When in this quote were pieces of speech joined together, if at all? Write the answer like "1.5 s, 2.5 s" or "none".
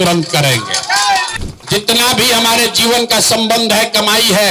1.3 s

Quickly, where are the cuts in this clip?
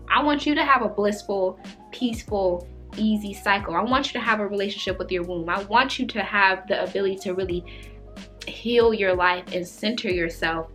none

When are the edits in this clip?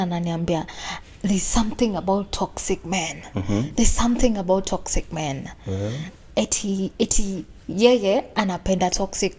none

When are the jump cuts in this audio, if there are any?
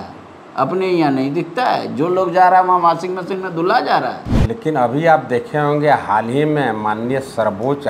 4.3 s

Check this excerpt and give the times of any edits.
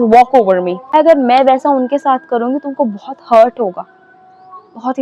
0.9 s

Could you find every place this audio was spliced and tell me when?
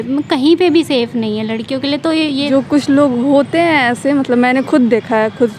2.5 s

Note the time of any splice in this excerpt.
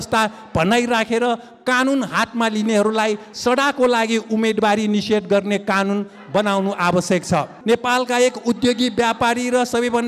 7.5 s

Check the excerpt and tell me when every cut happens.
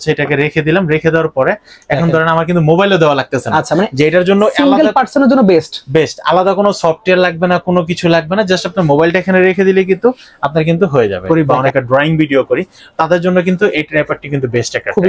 11.2 s

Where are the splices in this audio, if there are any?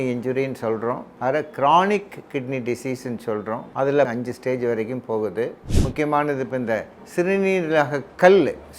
1.1 s, 3.9 s, 5.6 s

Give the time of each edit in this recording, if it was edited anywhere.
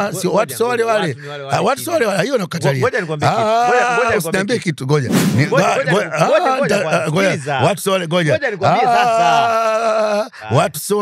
none

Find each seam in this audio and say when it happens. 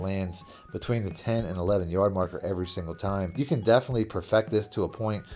3.4 s

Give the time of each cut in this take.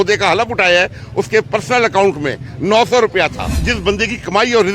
3.6 s

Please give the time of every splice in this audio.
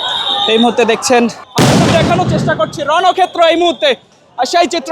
1.4 s

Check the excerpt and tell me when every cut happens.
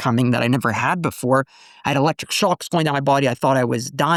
none

